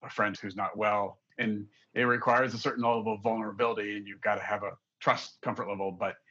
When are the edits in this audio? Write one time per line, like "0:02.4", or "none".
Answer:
none